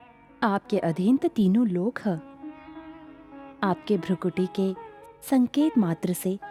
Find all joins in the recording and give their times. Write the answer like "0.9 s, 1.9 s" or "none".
none